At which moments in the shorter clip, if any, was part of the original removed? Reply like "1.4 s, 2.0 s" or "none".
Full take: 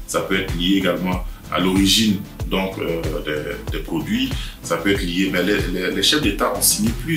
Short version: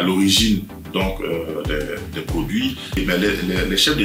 3.0 s